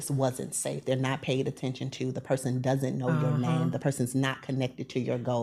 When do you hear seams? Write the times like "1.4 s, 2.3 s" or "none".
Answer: none